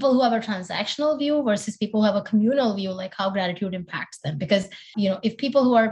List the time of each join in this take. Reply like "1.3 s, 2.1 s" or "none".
4.9 s